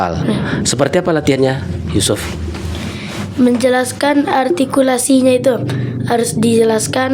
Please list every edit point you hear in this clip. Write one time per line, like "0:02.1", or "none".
none